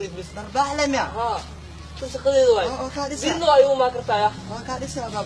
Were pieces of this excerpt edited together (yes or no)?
no